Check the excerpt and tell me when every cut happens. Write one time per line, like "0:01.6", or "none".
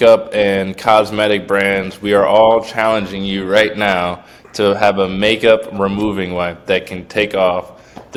none